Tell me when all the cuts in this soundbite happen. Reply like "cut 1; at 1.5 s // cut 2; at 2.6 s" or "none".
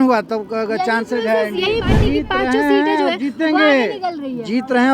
cut 1; at 1.9 s